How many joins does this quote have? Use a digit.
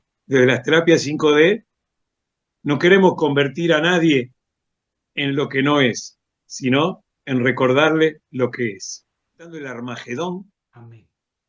1